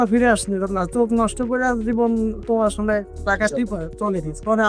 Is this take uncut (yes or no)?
yes